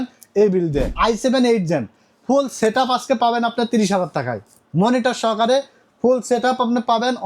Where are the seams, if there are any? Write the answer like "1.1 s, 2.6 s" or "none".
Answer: 0.9 s